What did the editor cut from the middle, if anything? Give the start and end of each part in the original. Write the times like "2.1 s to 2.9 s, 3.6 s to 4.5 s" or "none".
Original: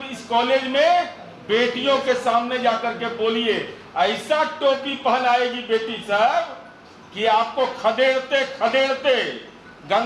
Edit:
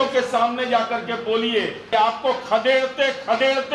3.7 s to 7.1 s